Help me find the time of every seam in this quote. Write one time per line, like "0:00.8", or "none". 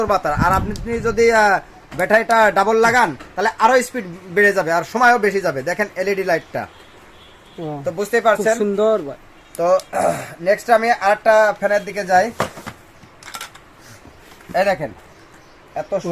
none